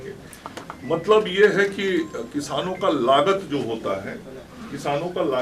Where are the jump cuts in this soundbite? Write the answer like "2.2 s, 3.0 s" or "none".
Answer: none